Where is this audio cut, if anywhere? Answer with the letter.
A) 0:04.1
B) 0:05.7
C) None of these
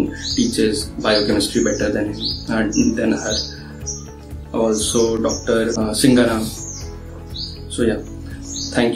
B